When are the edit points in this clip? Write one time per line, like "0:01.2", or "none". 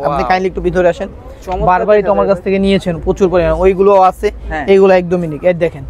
none